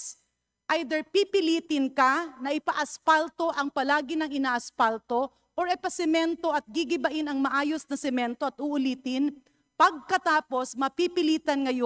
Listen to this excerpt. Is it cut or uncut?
uncut